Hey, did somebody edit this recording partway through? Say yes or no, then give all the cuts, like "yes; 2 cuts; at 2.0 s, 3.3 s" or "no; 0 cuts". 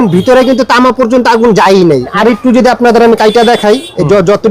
yes; 1 cut; at 2.1 s